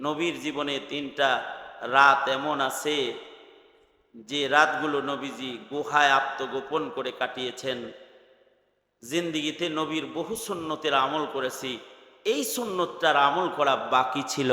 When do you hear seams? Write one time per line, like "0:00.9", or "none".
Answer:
none